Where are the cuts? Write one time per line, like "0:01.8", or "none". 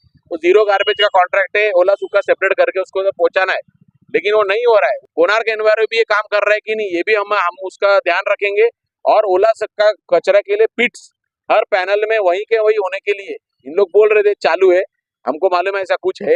0:05.0